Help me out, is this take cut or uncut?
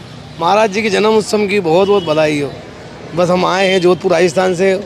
uncut